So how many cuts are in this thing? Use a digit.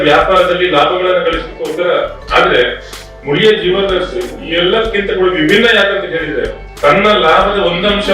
2